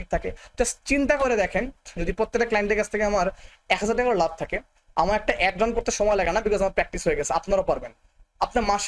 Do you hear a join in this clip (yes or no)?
no